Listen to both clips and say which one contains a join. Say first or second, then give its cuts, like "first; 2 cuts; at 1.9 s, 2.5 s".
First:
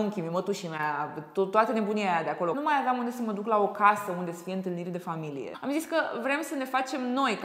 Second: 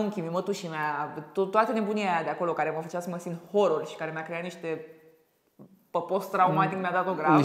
first; 2 cuts; at 2.6 s, 5.5 s